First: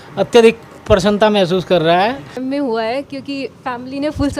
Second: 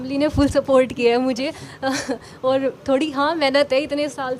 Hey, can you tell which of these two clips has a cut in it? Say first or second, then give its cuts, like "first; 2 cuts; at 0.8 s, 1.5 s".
first; 1 cut; at 2.3 s